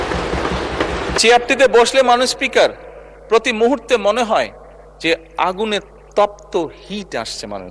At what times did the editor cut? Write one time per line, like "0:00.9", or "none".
0:01.2